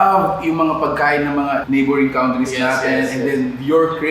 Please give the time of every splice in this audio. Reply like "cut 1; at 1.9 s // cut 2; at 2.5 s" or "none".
cut 1; at 1.6 s